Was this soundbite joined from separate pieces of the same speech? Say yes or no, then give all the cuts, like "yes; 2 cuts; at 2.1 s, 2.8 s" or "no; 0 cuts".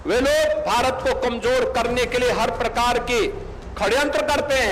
no; 0 cuts